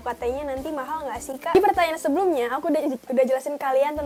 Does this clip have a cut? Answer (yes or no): no